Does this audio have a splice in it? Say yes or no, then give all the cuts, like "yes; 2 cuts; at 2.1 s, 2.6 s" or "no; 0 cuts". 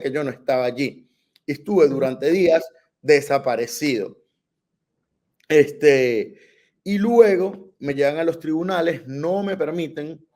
no; 0 cuts